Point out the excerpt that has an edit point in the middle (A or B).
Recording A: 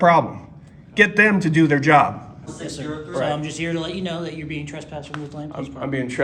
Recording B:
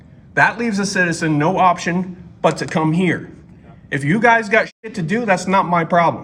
A